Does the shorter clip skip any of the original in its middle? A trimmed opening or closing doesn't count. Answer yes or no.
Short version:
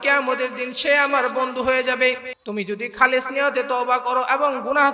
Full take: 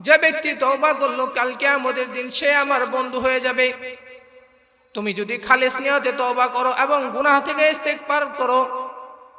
yes